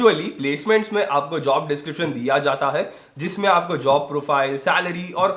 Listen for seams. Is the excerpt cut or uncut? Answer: uncut